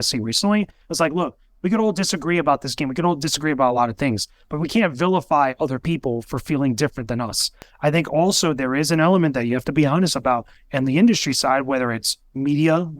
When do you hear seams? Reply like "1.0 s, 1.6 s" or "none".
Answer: 7.6 s